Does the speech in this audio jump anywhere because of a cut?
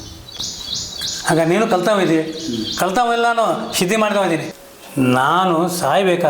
yes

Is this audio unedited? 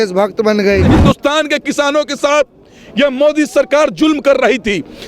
no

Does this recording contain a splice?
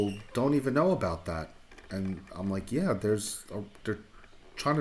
no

